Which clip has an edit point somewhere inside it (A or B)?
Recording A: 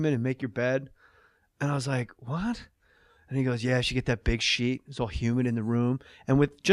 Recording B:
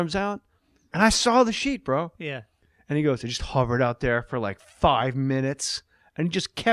A